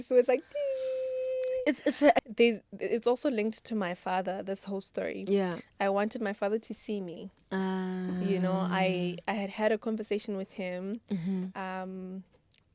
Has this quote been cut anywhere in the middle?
yes; 1 cut; at 2.2 s

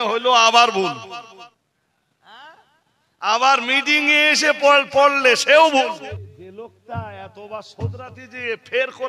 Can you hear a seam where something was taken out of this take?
yes; 2 cuts; at 1.5 s, 6.1 s

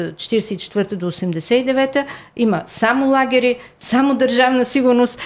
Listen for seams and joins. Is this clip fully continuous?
yes; 0 cuts

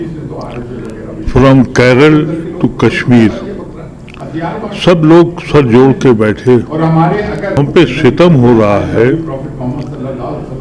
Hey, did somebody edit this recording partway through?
yes; 1 cut; at 7.6 s

